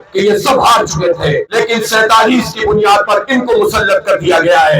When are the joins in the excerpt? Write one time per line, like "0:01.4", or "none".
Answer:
0:01.5